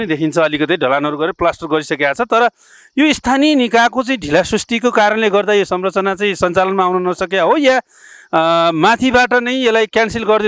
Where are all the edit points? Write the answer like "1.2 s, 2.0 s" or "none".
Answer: none